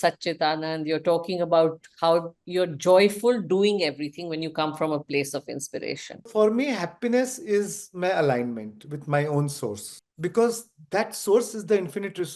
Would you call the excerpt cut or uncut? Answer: cut